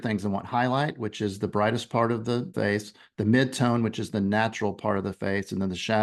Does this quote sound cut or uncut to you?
cut